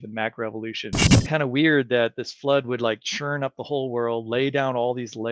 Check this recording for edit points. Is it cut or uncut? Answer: cut